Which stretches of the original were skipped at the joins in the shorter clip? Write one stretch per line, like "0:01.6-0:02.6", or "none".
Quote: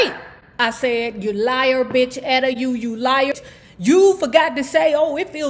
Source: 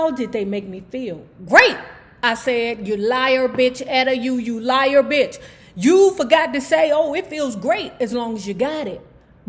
0:04.9-0:05.3